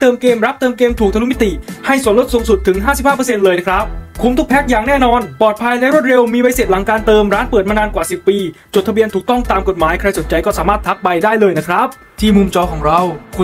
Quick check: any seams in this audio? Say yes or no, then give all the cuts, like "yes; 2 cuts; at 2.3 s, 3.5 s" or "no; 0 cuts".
yes; 1 cut; at 12.0 s